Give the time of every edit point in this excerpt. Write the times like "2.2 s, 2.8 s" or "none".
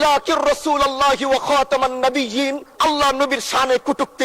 2.7 s